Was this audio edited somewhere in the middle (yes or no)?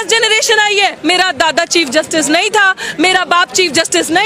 yes